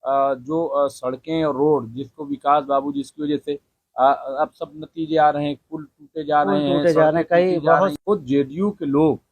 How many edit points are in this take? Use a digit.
1